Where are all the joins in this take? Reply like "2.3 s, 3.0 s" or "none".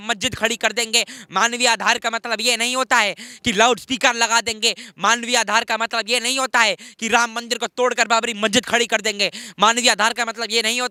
none